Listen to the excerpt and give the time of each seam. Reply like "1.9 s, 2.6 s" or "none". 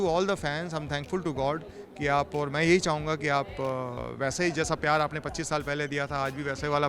none